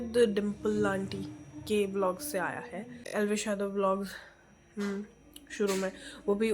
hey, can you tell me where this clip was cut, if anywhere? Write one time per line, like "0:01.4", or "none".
0:03.0

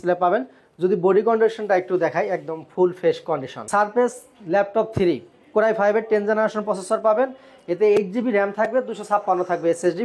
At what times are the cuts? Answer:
0:03.5

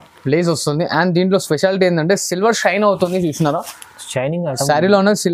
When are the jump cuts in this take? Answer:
none

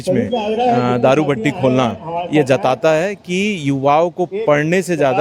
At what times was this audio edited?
none

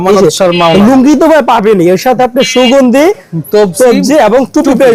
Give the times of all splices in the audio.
none

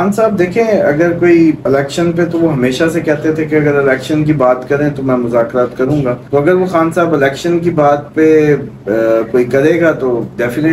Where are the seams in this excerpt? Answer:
0:01.6
0:06.2

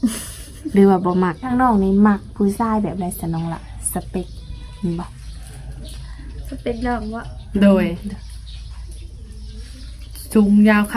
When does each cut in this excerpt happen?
0:01.5

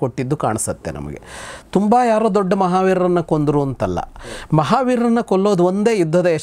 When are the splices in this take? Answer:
none

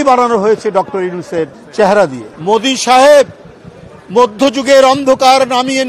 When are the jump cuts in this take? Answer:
0:01.6
0:02.3

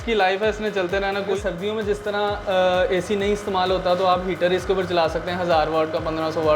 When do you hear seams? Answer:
0:01.3

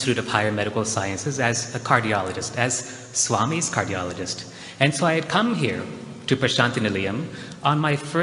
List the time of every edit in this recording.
0:02.7

